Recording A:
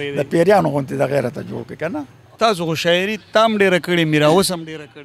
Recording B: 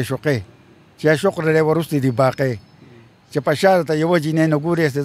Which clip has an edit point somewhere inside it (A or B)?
A